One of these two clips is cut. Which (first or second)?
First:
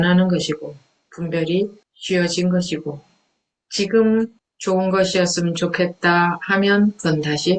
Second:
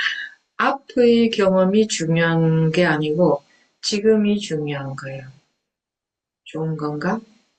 first